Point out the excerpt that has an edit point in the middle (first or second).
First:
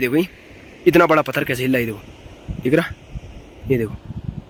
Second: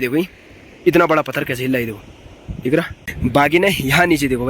second